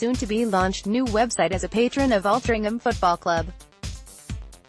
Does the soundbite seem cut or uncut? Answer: cut